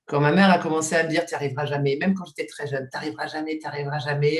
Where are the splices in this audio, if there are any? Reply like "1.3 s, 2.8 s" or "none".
none